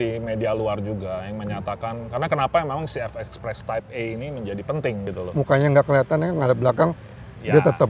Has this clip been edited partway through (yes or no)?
yes